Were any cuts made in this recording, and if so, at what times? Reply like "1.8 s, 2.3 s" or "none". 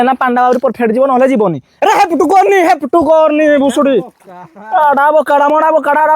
1.7 s